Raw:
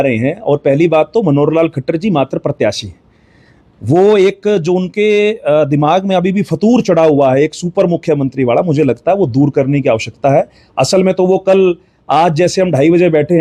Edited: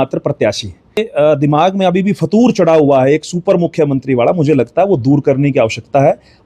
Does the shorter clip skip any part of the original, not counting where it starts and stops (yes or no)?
yes